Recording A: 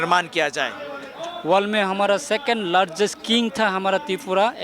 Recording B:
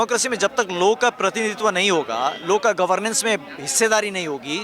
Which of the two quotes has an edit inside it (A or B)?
A